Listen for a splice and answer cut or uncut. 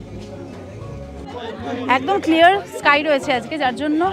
cut